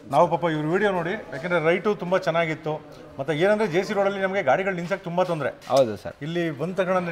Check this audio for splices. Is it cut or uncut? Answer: uncut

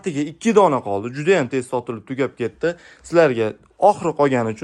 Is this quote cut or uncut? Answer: uncut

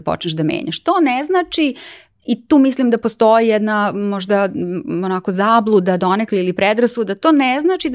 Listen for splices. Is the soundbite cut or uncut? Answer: uncut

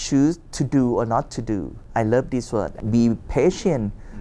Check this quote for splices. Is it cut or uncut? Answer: cut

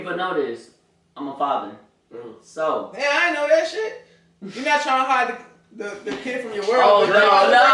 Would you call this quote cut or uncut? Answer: uncut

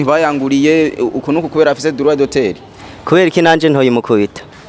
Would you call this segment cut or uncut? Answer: uncut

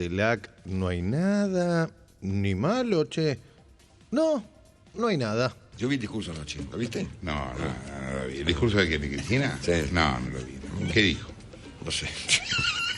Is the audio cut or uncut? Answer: cut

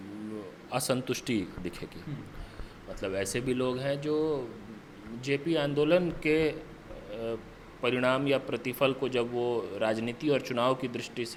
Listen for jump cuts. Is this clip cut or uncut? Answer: uncut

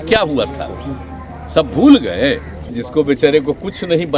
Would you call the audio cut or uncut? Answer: cut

